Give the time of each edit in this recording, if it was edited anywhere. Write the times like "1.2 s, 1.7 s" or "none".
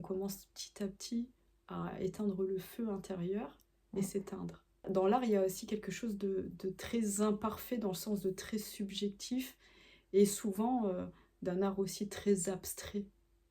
4.8 s

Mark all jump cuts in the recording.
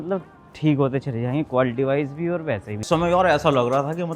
2.8 s

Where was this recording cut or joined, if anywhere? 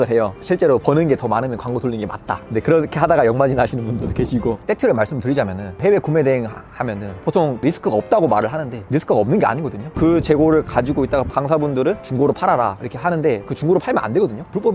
4.6 s, 9.9 s, 11.3 s, 13.5 s

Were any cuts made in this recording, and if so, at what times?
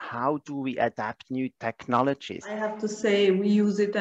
2.7 s

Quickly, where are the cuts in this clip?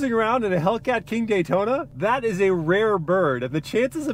1.9 s

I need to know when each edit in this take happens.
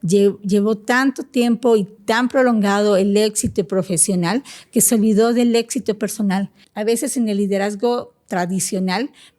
2.0 s, 6.6 s

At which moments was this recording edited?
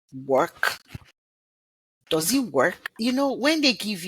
2.9 s

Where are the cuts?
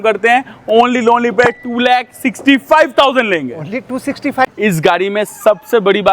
4.4 s

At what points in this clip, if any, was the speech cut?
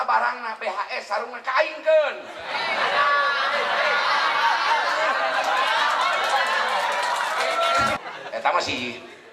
8.0 s

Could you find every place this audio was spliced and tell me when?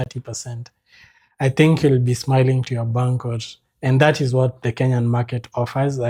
none

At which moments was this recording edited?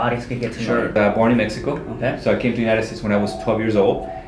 0.9 s

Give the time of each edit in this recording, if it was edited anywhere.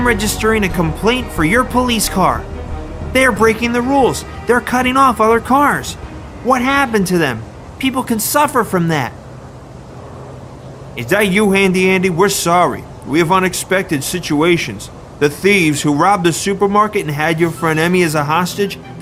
2.1 s

